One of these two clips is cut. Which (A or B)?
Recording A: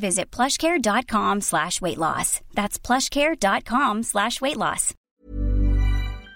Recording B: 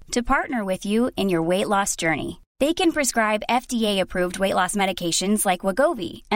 A